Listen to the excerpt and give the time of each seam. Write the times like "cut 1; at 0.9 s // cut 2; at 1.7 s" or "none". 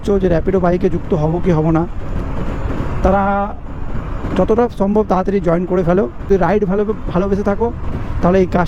none